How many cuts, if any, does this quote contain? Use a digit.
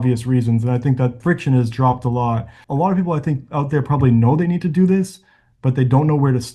2